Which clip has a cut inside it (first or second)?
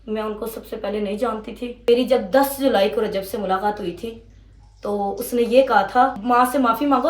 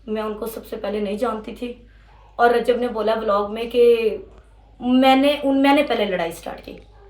first